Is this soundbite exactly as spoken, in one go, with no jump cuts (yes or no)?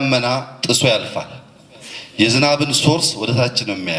yes